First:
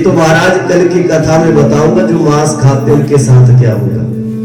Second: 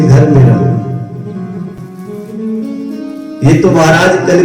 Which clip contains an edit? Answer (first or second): second